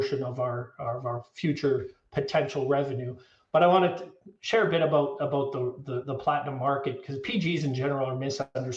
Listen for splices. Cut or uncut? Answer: uncut